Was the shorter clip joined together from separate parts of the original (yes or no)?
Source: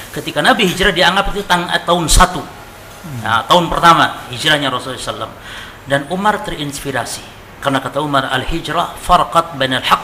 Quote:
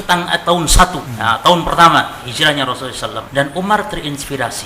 yes